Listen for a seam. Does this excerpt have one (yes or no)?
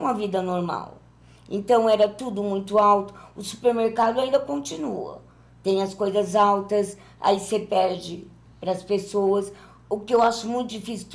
no